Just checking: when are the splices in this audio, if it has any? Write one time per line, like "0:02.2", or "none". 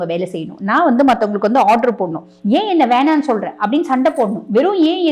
0:02.3

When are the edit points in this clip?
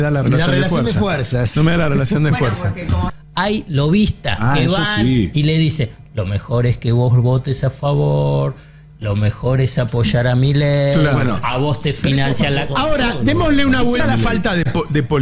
0:03.1
0:14.0

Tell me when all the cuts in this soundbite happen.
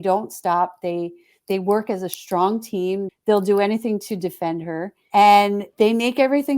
0:03.1
0:04.9
0:05.7

